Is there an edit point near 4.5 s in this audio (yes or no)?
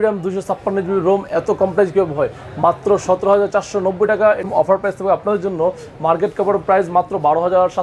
yes